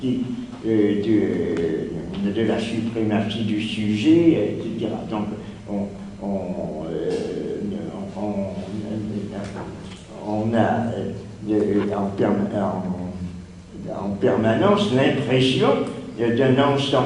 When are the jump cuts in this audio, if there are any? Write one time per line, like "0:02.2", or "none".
none